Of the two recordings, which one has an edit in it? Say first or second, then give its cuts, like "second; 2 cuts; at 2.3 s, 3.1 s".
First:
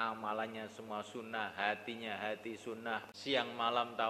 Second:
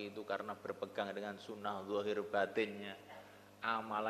first; 1 cut; at 3.1 s